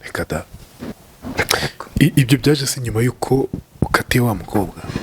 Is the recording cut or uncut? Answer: cut